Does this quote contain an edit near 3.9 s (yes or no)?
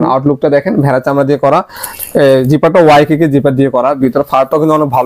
no